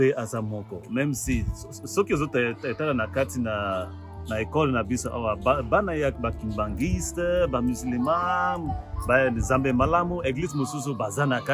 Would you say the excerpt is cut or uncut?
uncut